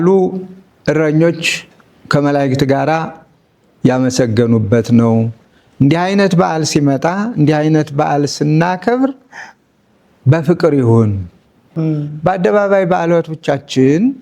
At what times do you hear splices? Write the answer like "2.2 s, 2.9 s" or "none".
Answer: 11.7 s